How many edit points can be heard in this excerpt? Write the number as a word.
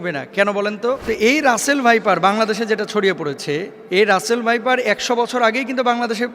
two